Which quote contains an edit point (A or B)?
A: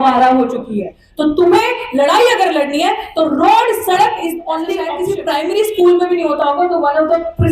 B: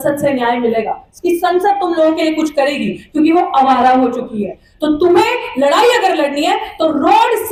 A